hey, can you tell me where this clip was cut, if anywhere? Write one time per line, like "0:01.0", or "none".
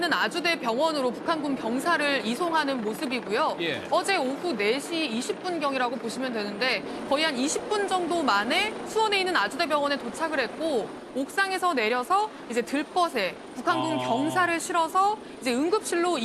0:01.7

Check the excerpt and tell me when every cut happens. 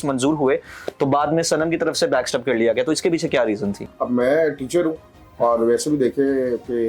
0:03.9

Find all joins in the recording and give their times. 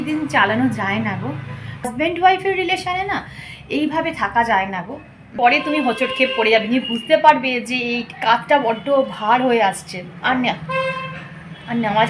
0:01.9
0:05.3

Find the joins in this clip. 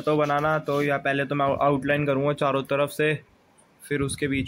none

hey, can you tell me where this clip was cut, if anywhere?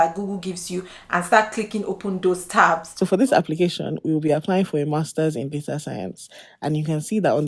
0:02.9

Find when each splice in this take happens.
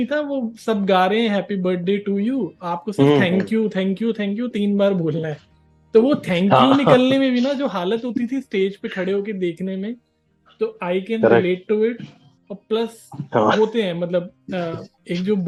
none

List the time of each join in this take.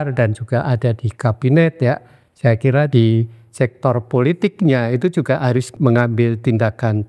0:02.9
0:05.7

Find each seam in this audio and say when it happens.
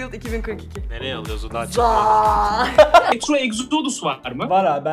0:03.1

